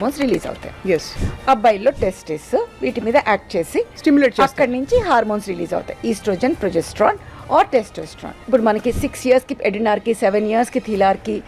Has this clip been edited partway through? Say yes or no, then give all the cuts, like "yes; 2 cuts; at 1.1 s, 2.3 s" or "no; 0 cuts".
yes; 2 cuts; at 1.2 s, 8.4 s